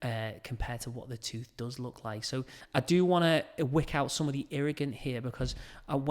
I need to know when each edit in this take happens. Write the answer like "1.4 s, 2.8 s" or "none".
2.6 s